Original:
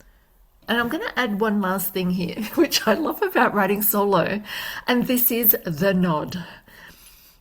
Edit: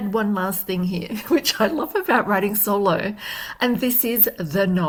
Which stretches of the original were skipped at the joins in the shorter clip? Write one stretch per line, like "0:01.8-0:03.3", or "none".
none